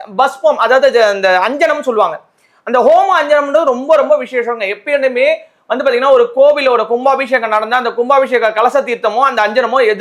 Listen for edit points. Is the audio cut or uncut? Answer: uncut